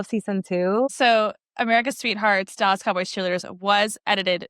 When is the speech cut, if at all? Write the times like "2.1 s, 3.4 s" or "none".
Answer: 0.9 s